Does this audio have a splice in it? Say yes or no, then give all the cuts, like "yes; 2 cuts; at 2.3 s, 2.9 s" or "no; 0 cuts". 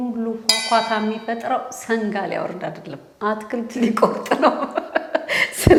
no; 0 cuts